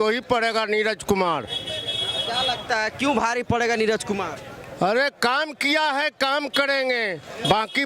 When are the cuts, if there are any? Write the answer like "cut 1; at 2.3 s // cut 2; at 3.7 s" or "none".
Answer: none